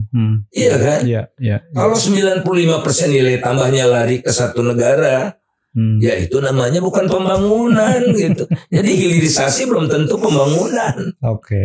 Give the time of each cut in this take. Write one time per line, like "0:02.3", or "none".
none